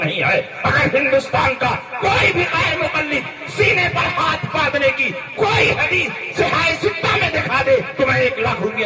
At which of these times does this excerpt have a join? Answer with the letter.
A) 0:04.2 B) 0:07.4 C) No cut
C